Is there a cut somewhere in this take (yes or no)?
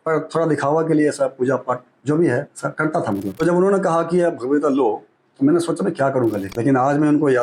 yes